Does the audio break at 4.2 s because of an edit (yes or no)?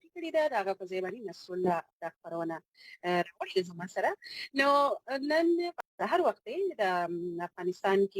no